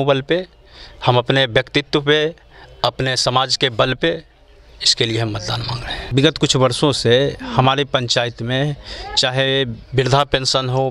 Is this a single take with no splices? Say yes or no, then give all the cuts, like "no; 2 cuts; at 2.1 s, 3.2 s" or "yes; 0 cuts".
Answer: no; 1 cut; at 6.0 s